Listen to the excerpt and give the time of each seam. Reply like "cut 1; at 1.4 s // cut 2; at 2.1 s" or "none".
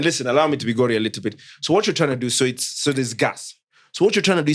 none